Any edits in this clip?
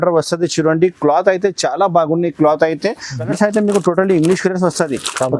yes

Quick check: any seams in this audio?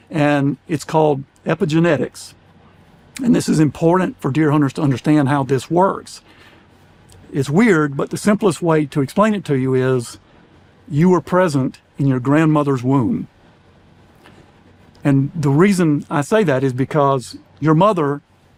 no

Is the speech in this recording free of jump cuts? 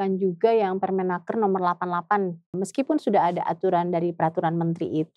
no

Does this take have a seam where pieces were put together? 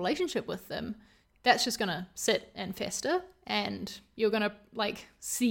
no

